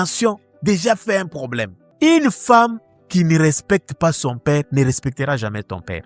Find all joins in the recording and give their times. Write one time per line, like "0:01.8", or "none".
0:01.9